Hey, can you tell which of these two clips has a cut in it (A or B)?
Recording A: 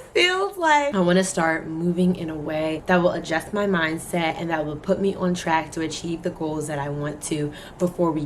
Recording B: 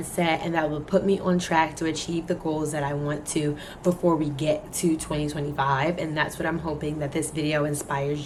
A